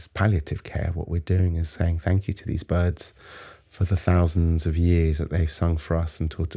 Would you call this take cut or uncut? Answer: uncut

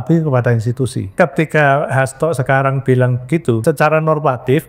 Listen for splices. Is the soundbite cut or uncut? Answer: cut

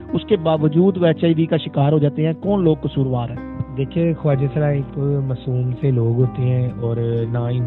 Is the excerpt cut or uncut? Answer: uncut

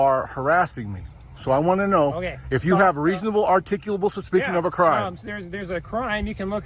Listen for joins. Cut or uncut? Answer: uncut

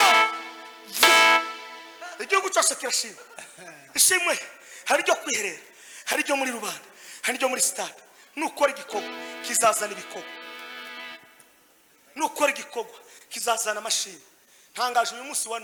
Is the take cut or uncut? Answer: uncut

